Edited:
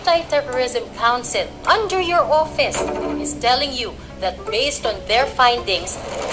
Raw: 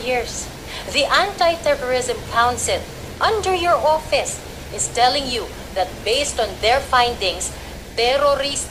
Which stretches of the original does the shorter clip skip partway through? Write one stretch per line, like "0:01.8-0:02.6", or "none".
0:02.9-0:03.1